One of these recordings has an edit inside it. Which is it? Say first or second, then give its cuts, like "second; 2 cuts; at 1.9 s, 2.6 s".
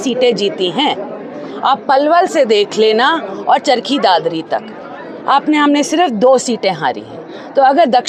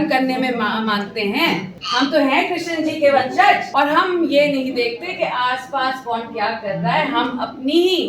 second; 2 cuts; at 1.8 s, 3.6 s